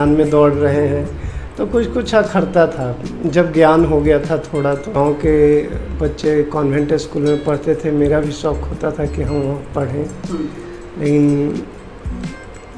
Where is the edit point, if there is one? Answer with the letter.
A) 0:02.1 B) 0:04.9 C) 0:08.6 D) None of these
B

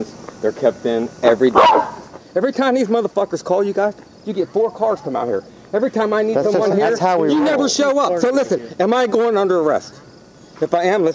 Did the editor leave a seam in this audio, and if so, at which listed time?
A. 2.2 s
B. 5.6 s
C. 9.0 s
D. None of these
A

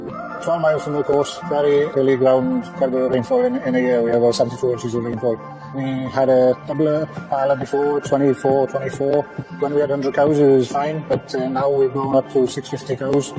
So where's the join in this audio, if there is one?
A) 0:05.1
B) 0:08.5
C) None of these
C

